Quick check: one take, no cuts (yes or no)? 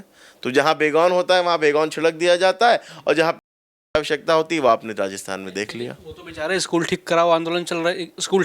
yes